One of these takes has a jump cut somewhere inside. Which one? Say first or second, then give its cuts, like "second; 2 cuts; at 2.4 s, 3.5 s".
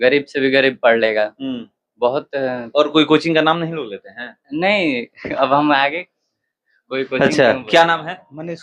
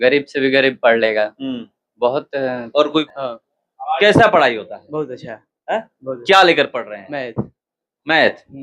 second; 1 cut; at 3.0 s